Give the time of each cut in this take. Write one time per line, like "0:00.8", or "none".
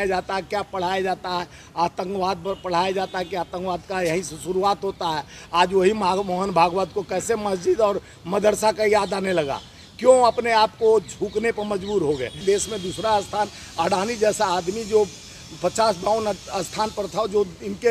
0:12.4